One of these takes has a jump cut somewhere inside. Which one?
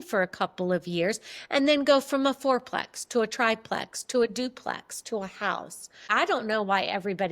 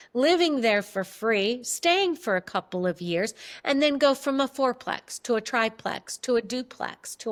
first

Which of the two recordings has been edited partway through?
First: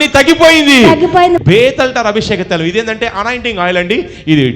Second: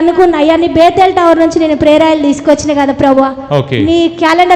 first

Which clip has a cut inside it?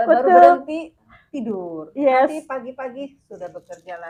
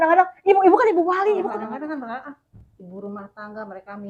second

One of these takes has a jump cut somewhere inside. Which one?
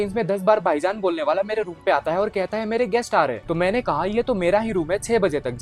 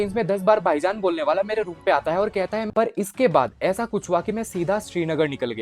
second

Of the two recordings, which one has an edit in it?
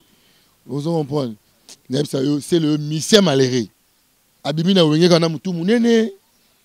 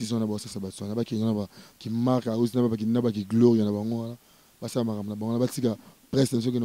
first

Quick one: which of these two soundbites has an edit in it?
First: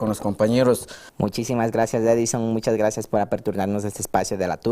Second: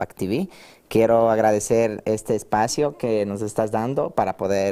first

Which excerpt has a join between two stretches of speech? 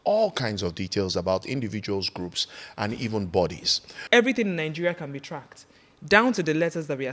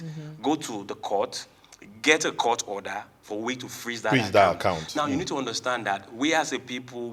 first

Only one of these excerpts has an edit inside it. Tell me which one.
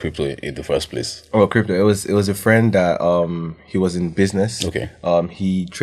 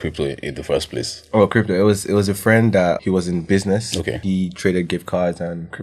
second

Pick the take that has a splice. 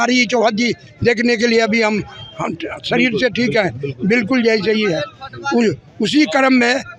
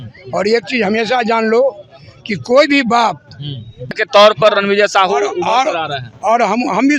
second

